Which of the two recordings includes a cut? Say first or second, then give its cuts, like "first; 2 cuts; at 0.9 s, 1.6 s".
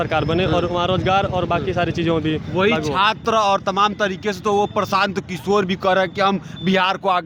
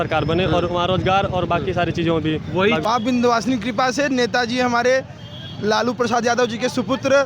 second; 1 cut; at 2.8 s